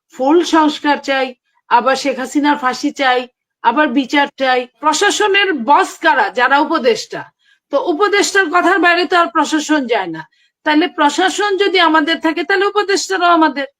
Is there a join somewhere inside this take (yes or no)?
yes